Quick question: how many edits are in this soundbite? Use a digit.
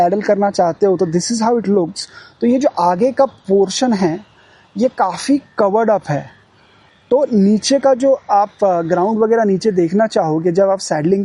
0